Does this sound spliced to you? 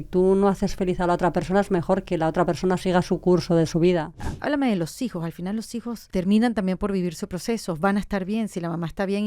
yes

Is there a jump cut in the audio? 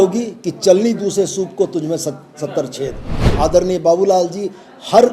yes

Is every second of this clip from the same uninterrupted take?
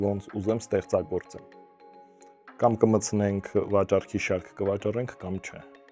yes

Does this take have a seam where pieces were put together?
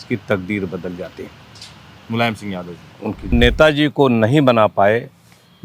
yes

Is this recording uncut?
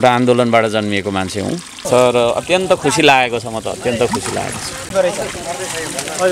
no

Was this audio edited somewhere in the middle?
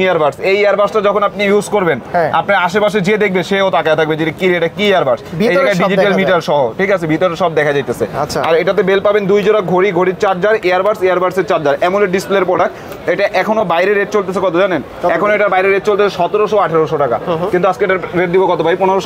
no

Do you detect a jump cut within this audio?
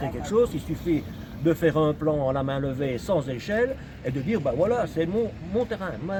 no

